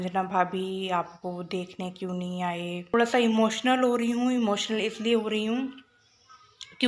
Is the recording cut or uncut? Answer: cut